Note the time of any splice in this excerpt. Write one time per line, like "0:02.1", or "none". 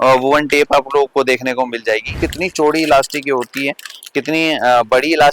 0:02.1